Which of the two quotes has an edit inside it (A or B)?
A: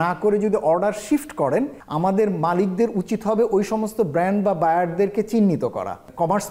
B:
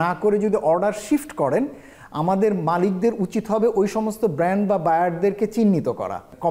A